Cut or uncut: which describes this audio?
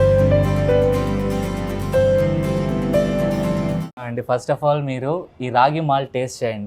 cut